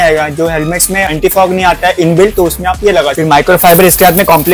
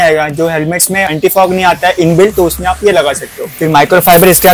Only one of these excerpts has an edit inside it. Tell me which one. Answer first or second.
first